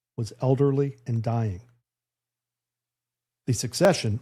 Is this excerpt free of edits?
yes; 0 cuts

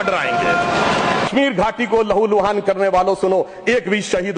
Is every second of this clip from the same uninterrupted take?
no; 1 cut; at 1.3 s

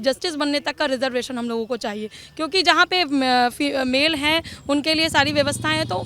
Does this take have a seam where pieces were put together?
no; 0 cuts

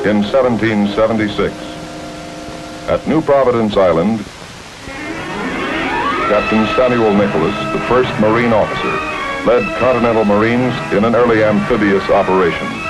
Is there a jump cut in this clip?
yes; 1 cut; at 7.9 s

